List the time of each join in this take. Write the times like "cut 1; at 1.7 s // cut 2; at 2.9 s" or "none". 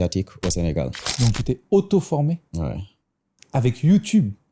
cut 1; at 1.1 s